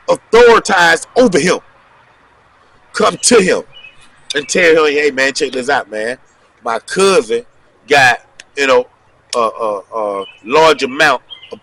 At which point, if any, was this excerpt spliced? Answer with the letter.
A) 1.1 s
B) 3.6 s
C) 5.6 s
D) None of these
D